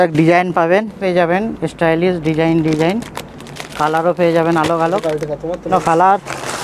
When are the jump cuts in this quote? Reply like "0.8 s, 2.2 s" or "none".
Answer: 0.9 s, 5.7 s